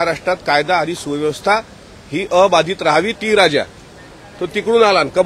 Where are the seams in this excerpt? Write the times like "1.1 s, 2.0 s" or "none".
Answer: 3.2 s

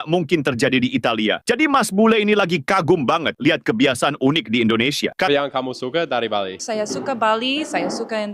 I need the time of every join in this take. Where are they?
5.3 s

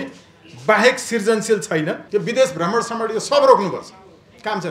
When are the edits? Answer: 2.0 s

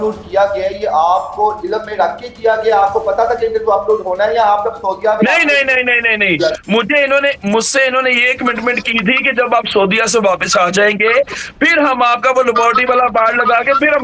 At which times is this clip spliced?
none

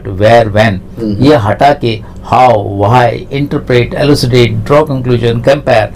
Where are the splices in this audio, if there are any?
none

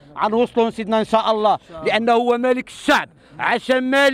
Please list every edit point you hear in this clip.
none

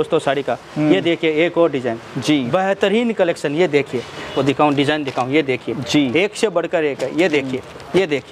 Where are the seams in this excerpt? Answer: 4.3 s

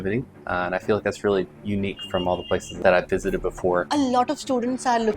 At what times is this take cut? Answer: 2.7 s, 3.9 s

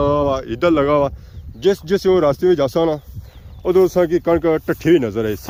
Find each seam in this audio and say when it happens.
none

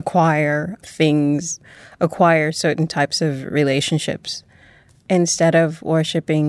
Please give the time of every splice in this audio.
1.6 s, 5.0 s

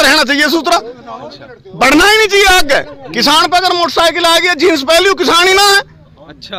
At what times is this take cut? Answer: none

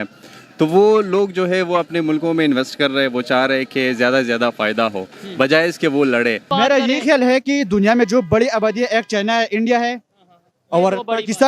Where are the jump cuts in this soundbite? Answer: 6.4 s

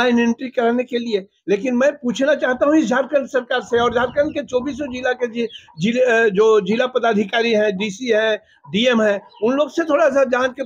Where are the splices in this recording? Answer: none

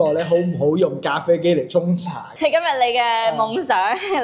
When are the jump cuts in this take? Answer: 2.3 s

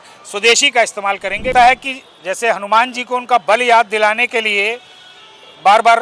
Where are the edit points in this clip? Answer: 1.5 s

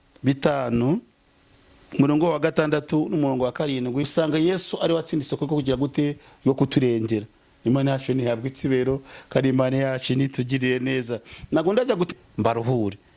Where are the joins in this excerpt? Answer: 4.1 s, 12.1 s

